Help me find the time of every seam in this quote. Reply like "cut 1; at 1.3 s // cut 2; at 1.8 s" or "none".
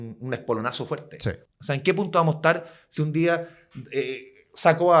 cut 1; at 1.5 s